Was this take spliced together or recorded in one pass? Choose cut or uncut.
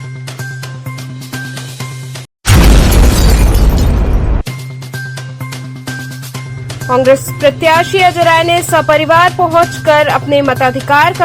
uncut